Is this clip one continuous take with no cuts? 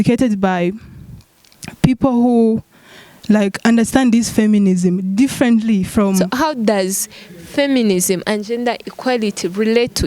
no; 1 cut; at 6.3 s

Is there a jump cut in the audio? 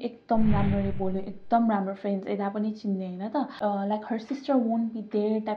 yes; 1 cut; at 3.5 s

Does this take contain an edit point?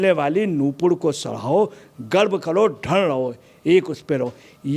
no; 0 cuts

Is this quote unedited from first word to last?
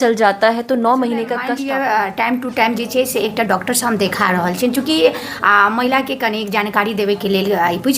no; 1 cut; at 1.5 s

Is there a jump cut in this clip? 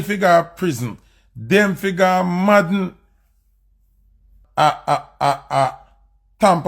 yes; 1 cut; at 4.4 s

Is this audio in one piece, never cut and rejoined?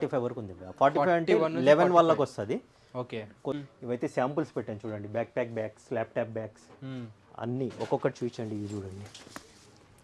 no; 1 cut; at 3.6 s

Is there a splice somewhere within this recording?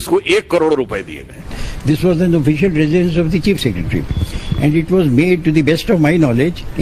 yes; 1 cut; at 1.5 s

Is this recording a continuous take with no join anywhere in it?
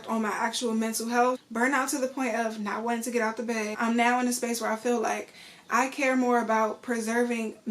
no; 2 cuts; at 1.4 s, 3.7 s

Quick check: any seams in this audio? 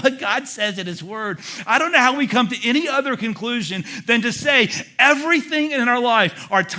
no; 0 cuts

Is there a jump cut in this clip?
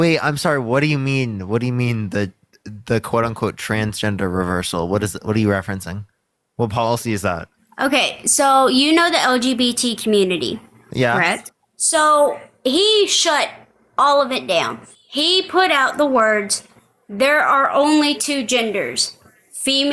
no; 0 cuts

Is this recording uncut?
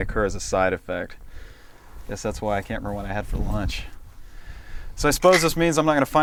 yes; 0 cuts

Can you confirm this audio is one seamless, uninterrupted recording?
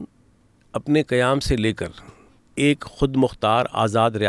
yes; 0 cuts

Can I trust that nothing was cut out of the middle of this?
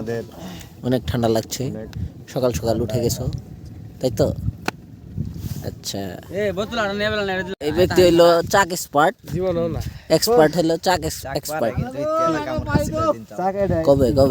yes; 0 cuts

